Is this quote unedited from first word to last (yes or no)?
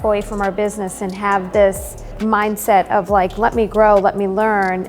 no